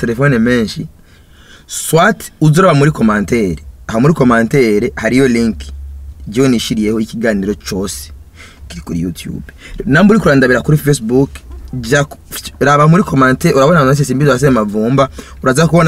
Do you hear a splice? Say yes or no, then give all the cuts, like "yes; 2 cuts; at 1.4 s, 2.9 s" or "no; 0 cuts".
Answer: no; 0 cuts